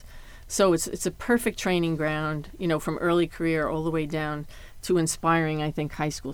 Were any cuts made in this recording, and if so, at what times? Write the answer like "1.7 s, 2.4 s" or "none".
none